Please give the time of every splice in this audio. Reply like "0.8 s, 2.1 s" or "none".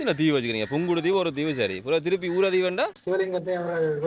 3.0 s